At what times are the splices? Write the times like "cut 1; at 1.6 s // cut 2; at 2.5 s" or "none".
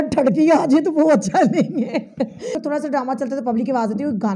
cut 1; at 2.5 s